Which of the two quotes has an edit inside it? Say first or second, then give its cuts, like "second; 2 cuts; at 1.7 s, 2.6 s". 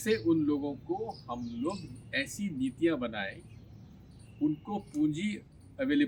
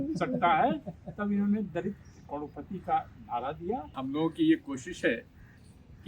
second; 1 cut; at 4.0 s